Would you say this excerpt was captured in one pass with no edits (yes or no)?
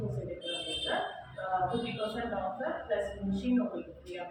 yes